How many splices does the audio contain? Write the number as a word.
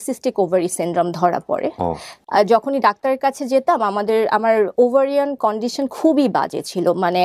one